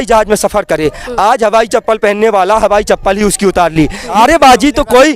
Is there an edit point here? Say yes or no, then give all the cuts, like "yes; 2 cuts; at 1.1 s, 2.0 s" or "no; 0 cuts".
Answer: yes; 1 cut; at 4.1 s